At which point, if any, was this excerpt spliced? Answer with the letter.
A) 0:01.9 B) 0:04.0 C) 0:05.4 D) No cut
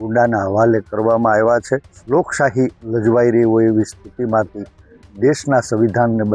A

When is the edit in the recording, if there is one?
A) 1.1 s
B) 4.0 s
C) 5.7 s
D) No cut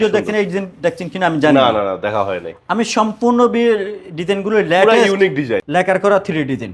C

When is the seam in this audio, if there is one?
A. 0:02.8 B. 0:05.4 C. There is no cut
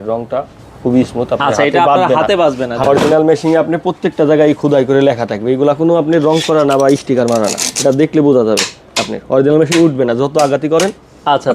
A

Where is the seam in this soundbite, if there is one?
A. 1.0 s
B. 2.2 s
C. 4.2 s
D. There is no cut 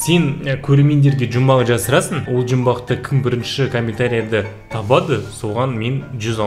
B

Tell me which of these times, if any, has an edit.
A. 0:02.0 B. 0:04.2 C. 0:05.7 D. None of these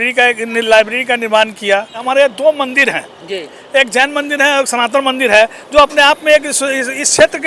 A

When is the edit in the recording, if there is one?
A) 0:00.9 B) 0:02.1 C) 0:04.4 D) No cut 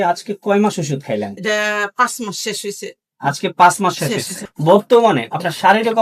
C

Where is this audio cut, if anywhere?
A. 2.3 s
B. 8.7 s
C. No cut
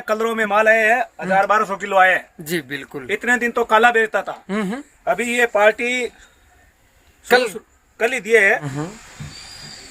B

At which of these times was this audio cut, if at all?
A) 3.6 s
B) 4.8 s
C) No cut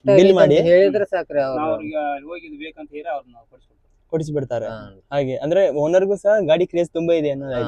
C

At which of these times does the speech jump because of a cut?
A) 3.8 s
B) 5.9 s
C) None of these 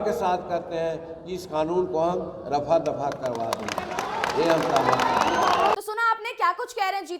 C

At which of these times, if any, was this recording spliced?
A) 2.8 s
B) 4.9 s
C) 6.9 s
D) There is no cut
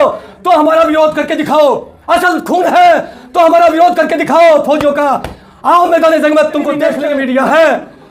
C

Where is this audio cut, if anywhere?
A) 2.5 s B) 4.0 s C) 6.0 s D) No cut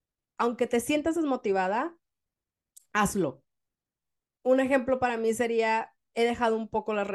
D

